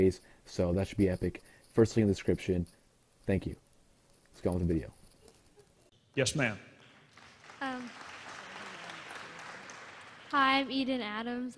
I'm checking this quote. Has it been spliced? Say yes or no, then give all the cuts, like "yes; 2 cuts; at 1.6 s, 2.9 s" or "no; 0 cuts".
no; 0 cuts